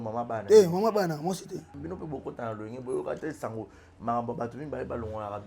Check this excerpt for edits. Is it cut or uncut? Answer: cut